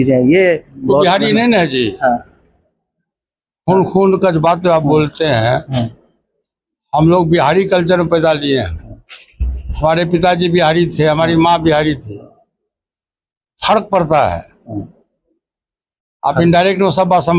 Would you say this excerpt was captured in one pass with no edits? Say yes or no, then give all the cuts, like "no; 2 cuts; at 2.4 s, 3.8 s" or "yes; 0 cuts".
yes; 0 cuts